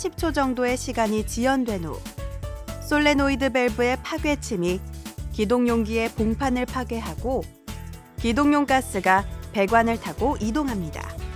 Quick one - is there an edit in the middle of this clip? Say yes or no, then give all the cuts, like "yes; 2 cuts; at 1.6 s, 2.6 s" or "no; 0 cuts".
no; 0 cuts